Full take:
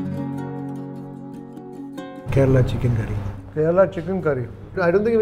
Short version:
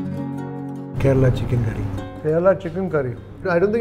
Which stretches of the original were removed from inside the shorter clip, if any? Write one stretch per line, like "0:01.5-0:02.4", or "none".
0:00.9-0:02.2